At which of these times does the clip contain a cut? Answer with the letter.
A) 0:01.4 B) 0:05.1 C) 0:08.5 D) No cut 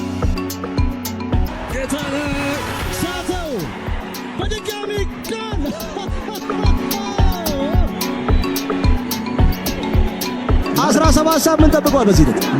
A